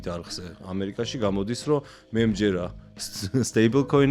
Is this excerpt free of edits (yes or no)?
yes